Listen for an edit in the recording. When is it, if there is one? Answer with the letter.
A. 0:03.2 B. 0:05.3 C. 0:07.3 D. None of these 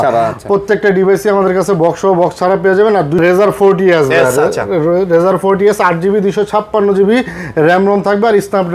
A